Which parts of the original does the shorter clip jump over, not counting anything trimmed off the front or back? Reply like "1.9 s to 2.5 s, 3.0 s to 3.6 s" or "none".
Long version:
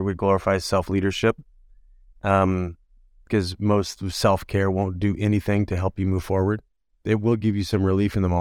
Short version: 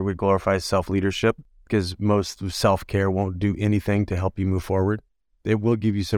1.5 s to 3.1 s